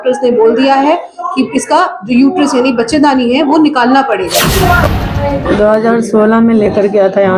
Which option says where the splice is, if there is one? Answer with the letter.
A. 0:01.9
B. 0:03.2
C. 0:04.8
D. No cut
C